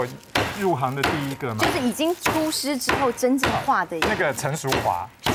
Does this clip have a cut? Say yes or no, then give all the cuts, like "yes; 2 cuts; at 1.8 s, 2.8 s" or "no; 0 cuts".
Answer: no; 0 cuts